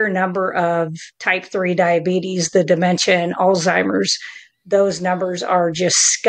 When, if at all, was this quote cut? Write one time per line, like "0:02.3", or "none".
none